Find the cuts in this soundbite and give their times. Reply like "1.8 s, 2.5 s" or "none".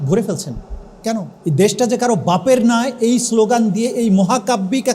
1.3 s